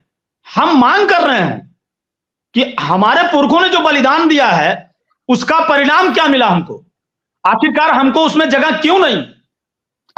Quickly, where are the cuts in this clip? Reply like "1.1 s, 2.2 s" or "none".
none